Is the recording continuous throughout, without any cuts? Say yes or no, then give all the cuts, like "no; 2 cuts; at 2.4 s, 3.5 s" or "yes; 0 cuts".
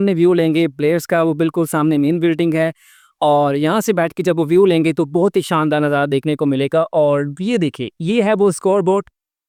yes; 0 cuts